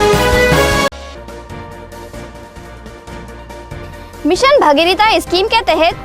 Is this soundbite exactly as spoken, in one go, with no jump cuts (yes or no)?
no